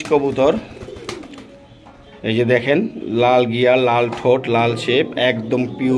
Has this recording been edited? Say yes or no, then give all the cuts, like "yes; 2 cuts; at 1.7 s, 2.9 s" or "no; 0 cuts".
no; 0 cuts